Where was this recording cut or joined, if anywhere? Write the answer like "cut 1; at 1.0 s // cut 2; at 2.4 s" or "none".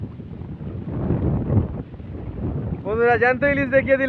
none